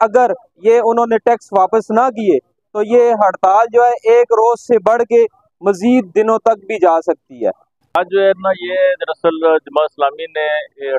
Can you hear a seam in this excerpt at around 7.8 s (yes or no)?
yes